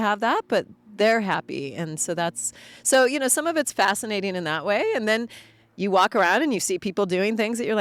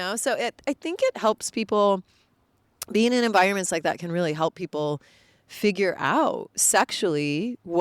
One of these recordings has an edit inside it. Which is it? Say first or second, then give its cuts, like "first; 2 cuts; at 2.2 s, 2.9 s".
second; 1 cut; at 6.5 s